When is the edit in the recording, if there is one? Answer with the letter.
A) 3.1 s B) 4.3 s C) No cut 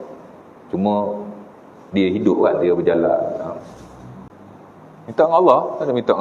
B